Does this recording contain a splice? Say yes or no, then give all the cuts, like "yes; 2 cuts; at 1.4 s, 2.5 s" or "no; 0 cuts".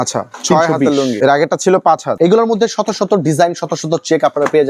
yes; 2 cuts; at 1.2 s, 2.1 s